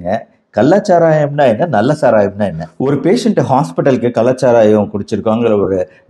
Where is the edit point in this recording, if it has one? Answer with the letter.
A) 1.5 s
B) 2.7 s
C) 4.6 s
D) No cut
B